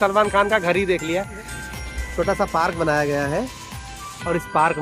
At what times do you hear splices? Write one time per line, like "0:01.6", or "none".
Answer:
0:01.4